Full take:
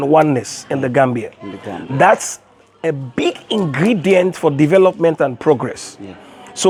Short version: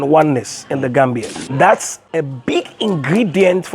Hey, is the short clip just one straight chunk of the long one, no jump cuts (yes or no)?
no